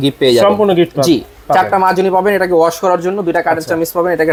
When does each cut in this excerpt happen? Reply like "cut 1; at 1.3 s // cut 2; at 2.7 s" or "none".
none